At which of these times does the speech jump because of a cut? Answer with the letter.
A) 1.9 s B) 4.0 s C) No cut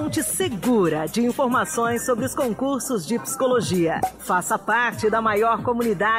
B